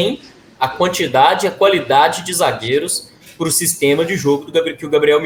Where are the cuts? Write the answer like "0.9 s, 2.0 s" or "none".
none

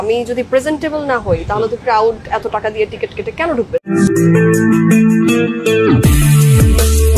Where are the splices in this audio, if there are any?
3.8 s

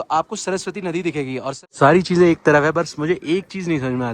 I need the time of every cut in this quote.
1.6 s

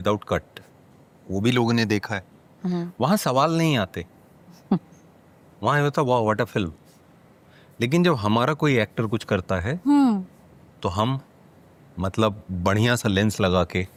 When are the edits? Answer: none

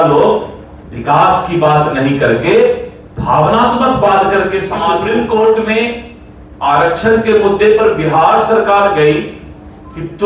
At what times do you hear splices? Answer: 5.0 s

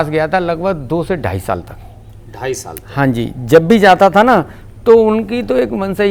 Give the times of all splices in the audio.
none

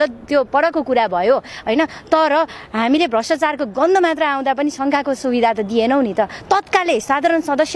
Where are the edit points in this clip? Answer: none

